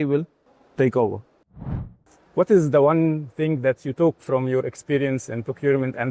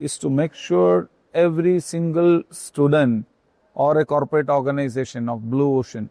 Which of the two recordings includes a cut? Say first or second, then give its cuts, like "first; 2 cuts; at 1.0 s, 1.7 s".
first; 1 cut; at 1.7 s